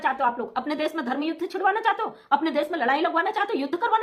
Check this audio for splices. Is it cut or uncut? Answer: uncut